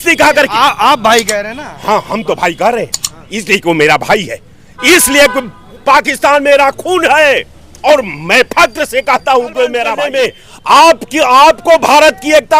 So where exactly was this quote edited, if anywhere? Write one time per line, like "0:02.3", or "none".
0:10.0